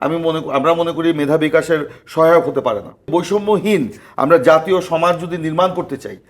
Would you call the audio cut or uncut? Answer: cut